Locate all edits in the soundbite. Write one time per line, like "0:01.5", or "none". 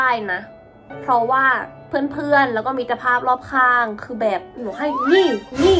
0:04.6